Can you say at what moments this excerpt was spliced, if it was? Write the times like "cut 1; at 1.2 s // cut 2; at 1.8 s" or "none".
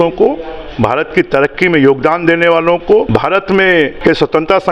cut 1; at 3.1 s // cut 2; at 3.9 s